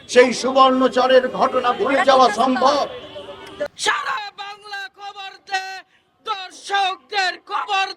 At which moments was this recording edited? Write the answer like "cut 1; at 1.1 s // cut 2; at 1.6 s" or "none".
cut 1; at 3.8 s